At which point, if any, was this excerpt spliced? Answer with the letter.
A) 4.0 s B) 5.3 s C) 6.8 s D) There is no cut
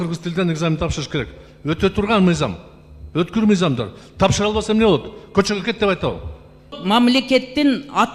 C